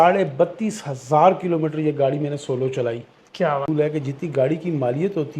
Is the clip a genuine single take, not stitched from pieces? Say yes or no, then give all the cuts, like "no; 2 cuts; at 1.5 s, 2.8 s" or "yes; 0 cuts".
no; 1 cut; at 3.7 s